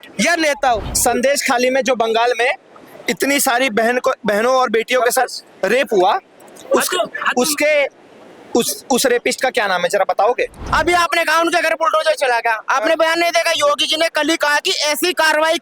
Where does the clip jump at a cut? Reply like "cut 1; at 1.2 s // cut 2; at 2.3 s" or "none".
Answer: cut 1; at 0.8 s // cut 2; at 10.7 s